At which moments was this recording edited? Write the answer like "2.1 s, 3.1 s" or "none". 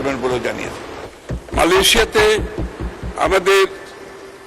1.1 s